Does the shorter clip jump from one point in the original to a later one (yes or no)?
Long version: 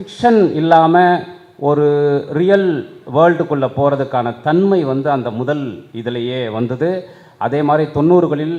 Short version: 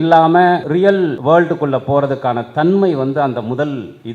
yes